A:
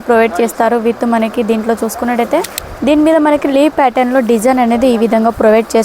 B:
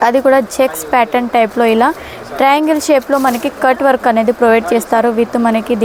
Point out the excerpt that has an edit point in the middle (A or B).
A